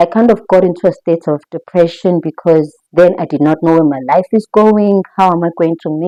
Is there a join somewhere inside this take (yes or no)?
no